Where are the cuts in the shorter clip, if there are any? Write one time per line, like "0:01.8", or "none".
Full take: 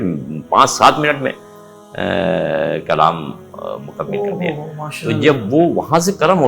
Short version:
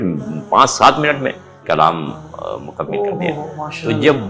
0:01.6